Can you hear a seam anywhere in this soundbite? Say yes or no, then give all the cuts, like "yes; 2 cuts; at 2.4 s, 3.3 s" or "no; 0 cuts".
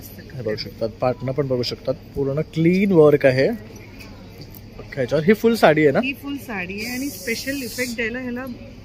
no; 0 cuts